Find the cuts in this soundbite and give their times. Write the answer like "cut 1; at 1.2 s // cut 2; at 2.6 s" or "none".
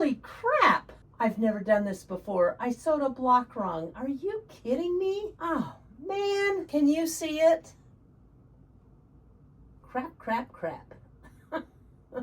cut 1; at 1.0 s // cut 2; at 5.3 s // cut 3; at 6.7 s // cut 4; at 9.8 s

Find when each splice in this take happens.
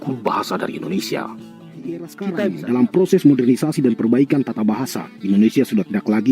cut 1; at 2.2 s

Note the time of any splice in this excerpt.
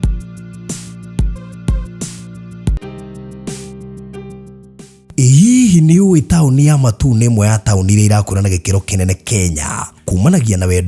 cut 1; at 2.8 s

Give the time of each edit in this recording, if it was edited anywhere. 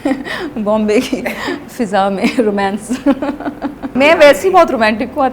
cut 1; at 3.9 s

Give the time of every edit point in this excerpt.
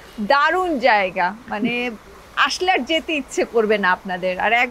none

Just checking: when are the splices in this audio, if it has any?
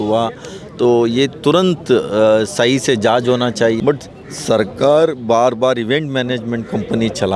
cut 1; at 3.8 s

